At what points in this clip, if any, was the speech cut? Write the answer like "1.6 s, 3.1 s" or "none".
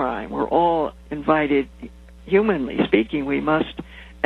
1.0 s